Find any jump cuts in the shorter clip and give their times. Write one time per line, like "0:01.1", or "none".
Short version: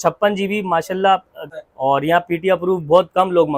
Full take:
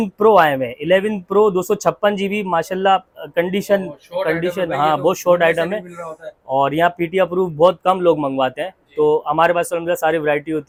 0:01.4